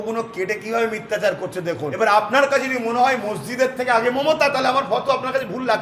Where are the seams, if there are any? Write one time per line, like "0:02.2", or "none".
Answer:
0:01.9

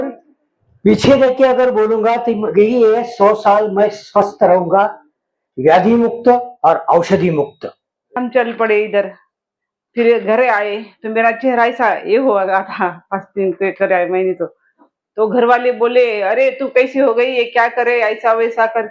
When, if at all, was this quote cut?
0:08.2

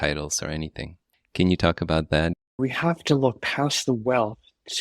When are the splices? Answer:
0:02.4

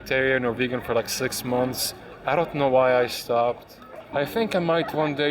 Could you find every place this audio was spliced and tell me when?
0:04.1

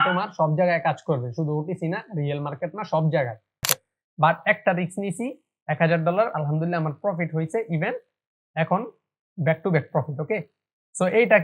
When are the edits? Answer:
0:03.6

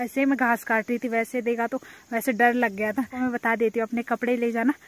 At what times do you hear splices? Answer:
0:03.2

